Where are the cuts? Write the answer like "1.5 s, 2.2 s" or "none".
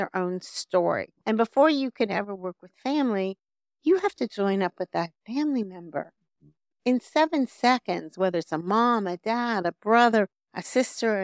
1.1 s

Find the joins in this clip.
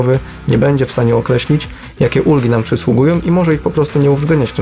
none

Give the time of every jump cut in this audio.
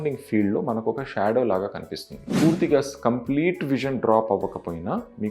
2.2 s

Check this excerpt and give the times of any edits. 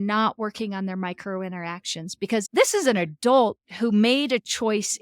2.4 s

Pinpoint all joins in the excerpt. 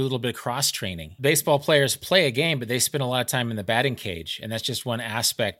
1.1 s

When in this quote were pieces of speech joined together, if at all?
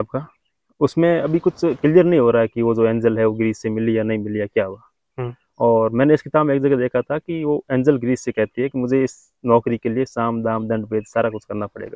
none

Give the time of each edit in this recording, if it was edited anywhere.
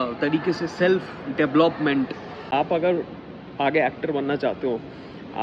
2.5 s

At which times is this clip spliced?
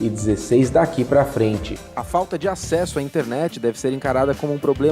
1.7 s

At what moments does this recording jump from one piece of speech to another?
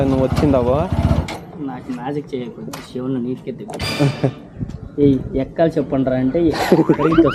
none

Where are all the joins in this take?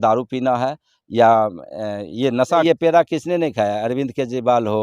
2.6 s

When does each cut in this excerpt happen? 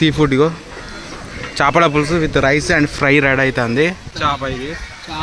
4.1 s

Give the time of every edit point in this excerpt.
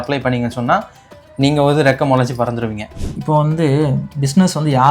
2.9 s

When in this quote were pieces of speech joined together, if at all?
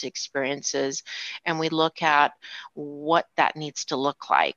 none

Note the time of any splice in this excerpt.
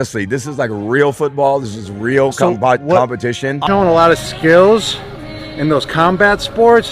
3.6 s

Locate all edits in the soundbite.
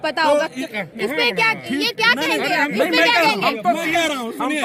none

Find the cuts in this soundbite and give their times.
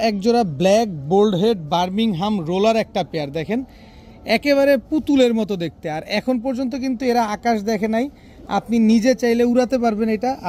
none

